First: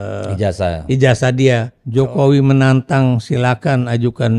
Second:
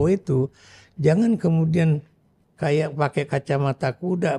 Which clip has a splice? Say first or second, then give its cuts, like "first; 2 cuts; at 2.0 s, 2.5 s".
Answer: first; 1 cut; at 1.8 s